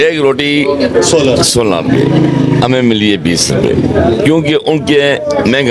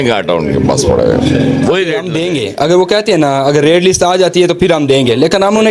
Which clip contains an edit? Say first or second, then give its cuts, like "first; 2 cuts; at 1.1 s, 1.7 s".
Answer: second; 1 cut; at 2.1 s